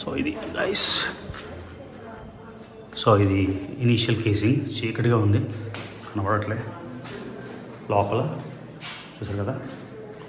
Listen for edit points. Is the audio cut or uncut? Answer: uncut